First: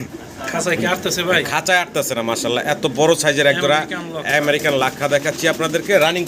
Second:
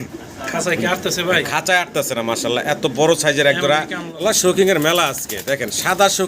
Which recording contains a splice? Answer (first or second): second